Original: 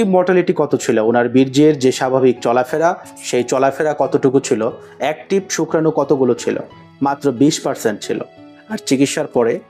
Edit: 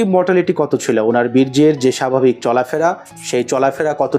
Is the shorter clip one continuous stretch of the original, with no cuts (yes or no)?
yes